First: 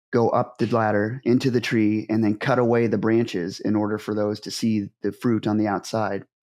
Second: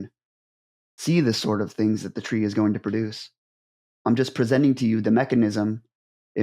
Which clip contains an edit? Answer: second; 1 cut; at 3.9 s

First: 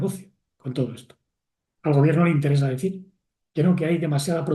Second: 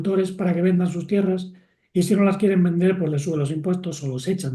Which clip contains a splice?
first; 1 cut; at 1.6 s

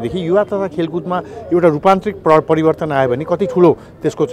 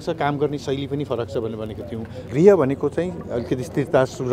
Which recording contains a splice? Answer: second; 1 cut; at 2.2 s

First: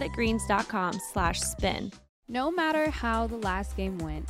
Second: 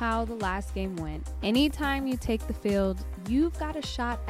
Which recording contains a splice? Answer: first; 1 cut; at 1.9 s

